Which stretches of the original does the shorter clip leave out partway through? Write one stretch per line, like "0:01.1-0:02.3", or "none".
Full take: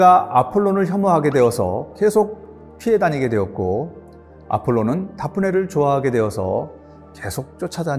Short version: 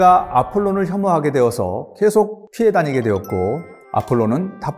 0:02.4-0:02.7
0:04.0-0:04.3